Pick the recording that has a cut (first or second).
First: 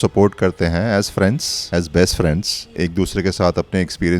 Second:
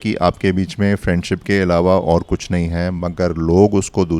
first